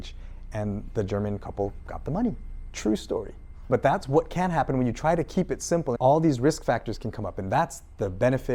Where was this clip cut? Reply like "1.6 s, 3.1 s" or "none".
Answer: 3.7 s, 6.0 s